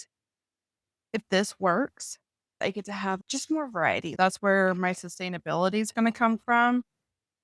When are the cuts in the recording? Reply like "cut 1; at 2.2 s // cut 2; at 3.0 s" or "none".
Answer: cut 1; at 2.5 s // cut 2; at 4.1 s